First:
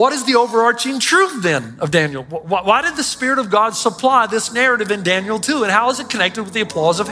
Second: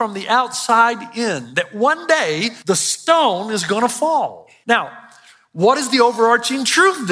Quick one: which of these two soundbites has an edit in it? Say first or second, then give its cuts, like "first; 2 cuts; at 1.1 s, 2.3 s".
second; 2 cuts; at 2.5 s, 4.5 s